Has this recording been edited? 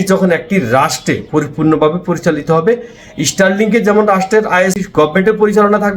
yes; 1 cut; at 4.8 s

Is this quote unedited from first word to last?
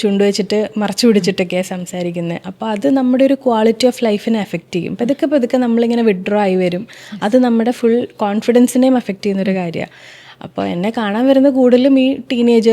yes; 0 cuts

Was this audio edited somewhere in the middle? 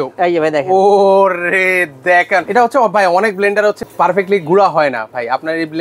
yes; 2 cuts; at 2.5 s, 3.8 s

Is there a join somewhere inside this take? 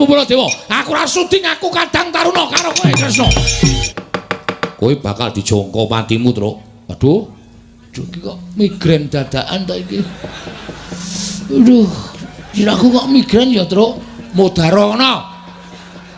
yes; 1 cut; at 3.9 s

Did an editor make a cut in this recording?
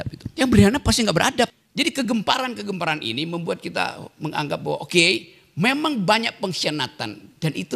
yes; 1 cut; at 1.5 s

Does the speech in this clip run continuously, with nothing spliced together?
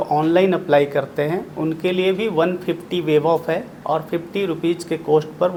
yes; 0 cuts

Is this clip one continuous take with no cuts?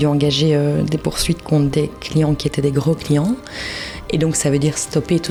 yes; 0 cuts

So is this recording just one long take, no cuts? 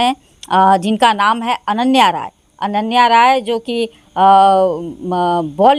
yes; 0 cuts

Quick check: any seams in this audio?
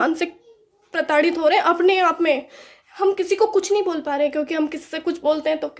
no; 0 cuts

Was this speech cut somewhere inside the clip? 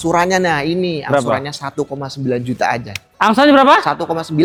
no; 0 cuts

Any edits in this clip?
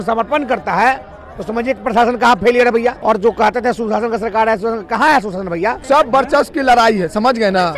yes; 2 cuts; at 3.0 s, 5.8 s

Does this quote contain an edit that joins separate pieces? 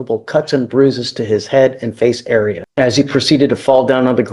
yes; 1 cut; at 2.6 s

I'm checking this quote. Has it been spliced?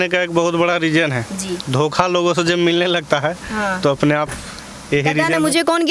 no; 0 cuts

